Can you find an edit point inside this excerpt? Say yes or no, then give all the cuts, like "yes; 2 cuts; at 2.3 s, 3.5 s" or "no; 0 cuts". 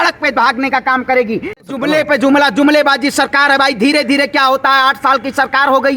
yes; 1 cut; at 1.7 s